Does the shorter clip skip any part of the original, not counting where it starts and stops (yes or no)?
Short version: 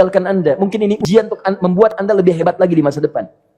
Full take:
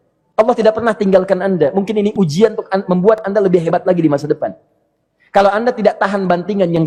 yes